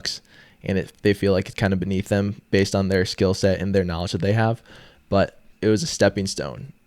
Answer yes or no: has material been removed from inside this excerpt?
yes